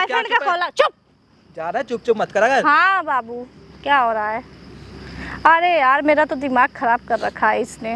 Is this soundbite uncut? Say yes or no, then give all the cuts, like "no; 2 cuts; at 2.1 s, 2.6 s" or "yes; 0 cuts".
yes; 0 cuts